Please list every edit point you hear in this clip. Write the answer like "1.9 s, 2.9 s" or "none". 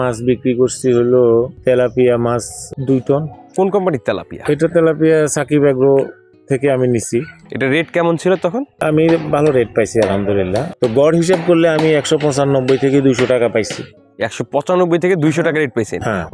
3.5 s, 7.4 s, 10.7 s